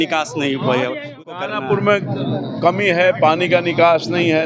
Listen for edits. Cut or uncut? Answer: cut